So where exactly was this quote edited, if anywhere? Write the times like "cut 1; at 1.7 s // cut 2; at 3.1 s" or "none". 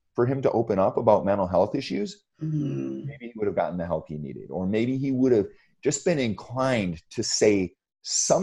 none